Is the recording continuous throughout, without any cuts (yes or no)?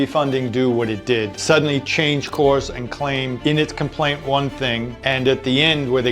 no